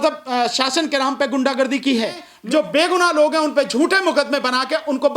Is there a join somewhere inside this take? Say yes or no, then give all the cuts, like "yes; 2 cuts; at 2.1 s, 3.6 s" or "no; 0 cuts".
yes; 1 cut; at 2.2 s